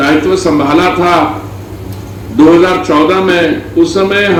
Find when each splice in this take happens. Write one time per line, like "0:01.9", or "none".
none